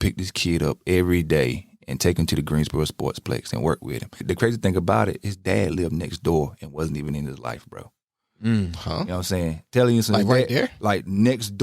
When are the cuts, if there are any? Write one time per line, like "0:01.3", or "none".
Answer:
0:04.1